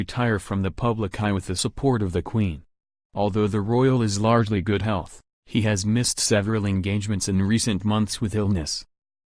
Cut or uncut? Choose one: cut